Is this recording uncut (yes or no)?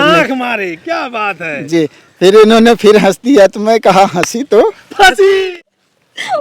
no